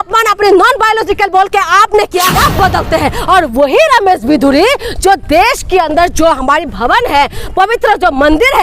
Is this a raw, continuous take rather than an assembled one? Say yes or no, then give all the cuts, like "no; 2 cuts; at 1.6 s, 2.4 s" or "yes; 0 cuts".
no; 1 cut; at 2.3 s